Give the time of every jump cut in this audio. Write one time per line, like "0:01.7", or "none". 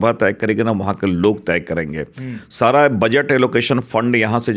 none